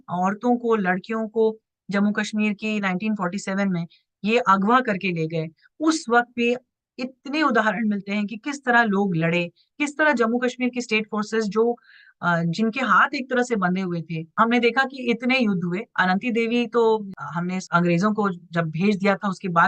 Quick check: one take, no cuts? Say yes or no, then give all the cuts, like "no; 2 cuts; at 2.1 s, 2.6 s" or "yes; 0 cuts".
no; 2 cuts; at 14.3 s, 17.1 s